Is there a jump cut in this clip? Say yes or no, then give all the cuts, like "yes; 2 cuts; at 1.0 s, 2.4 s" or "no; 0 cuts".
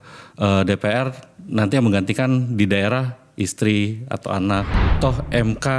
yes; 1 cut; at 4.8 s